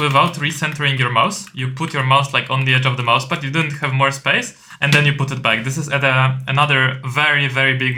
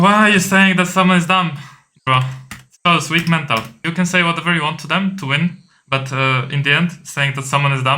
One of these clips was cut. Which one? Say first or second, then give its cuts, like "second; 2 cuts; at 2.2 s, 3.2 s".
second; 1 cut; at 3.7 s